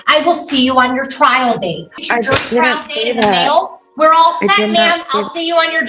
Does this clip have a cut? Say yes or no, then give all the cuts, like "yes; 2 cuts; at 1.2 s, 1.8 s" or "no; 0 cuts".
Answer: yes; 1 cut; at 2.0 s